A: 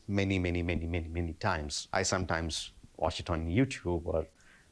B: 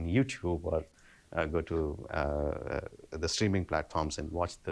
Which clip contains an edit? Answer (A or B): A